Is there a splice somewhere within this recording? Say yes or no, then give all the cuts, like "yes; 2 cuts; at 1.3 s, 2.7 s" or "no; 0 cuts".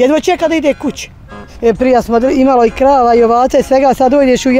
yes; 1 cut; at 1.4 s